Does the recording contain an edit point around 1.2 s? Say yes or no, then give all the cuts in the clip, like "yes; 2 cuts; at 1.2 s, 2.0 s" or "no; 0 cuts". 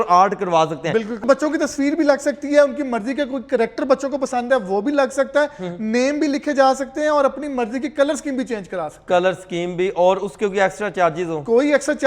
yes; 1 cut; at 1.2 s